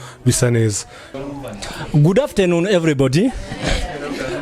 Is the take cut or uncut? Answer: cut